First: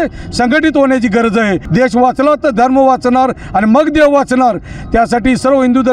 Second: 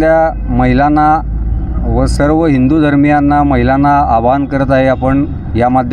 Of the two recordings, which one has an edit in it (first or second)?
first